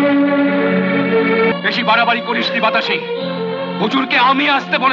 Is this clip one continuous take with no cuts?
no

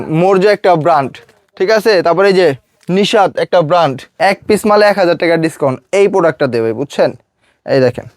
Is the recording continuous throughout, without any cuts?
no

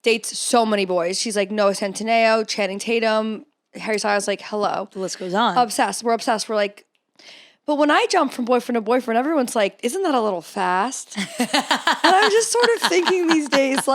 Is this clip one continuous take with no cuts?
yes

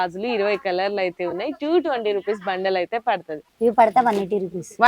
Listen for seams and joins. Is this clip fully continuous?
no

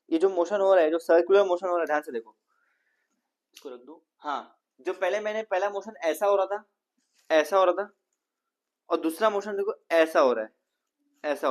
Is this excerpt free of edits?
yes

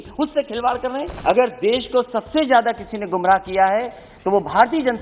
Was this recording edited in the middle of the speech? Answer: yes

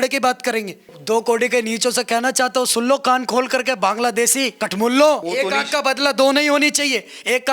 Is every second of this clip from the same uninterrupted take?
no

